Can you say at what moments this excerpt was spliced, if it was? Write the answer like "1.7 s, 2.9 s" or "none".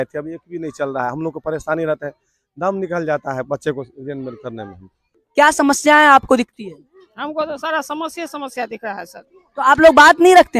5.1 s